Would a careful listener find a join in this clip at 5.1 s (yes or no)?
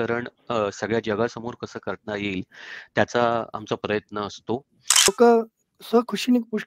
yes